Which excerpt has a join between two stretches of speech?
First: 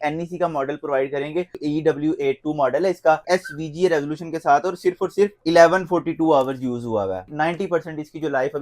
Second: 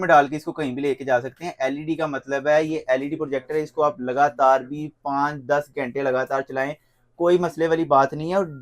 first; 4 cuts; at 1.6 s, 3.2 s, 5.4 s, 7.2 s

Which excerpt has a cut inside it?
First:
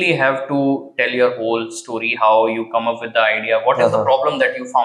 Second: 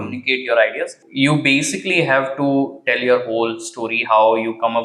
second; 1 cut; at 1.0 s

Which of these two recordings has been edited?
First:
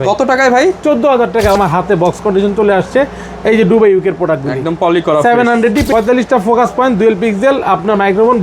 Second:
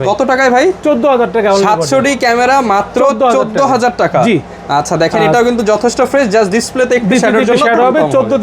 first; 2 cuts; at 1.6 s, 5.9 s

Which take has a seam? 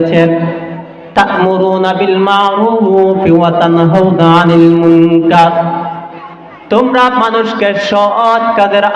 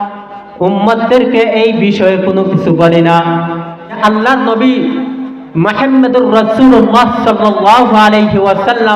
second; 1 cut; at 4.0 s

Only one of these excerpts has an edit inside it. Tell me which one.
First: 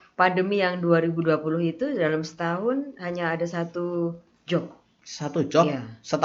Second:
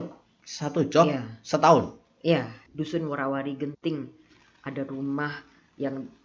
second; 1 cut; at 2.6 s

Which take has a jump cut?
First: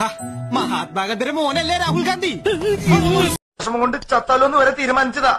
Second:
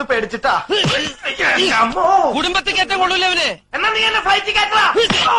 first; 1 cut; at 3.5 s

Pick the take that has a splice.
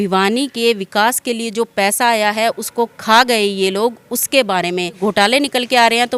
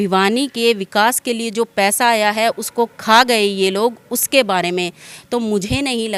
first; 1 cut; at 5.0 s

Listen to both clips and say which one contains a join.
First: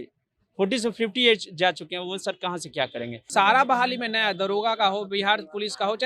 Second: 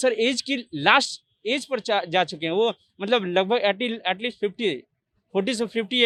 first; 1 cut; at 3.3 s

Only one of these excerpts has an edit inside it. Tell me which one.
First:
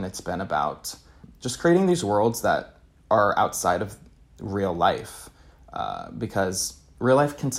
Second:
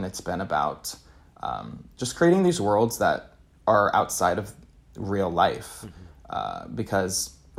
first; 1 cut; at 1.2 s

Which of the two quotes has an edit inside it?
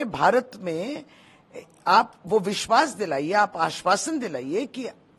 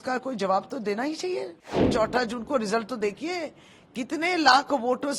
second; 1 cut; at 1.8 s

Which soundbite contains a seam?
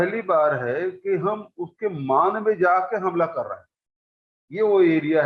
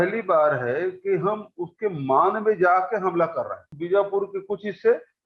second; 1 cut; at 3.7 s

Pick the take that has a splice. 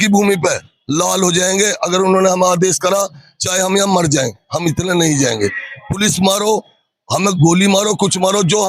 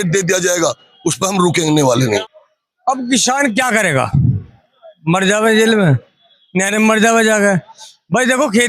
second; 1 cut; at 2.2 s

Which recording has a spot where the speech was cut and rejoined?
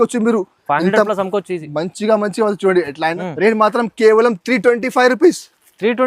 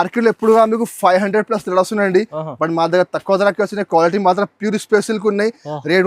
first; 1 cut; at 3.2 s

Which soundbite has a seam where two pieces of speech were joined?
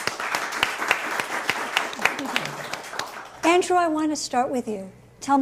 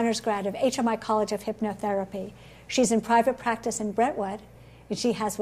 second; 1 cut; at 2.6 s

